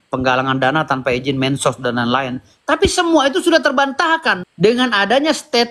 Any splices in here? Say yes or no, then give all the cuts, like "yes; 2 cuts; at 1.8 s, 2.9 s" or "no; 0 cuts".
yes; 1 cut; at 4.4 s